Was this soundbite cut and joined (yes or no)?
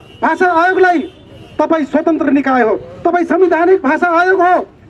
no